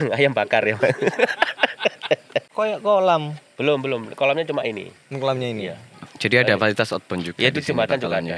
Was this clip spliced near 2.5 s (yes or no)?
yes